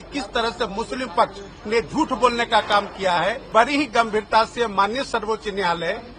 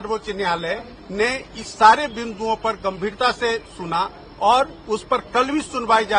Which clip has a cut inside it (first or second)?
first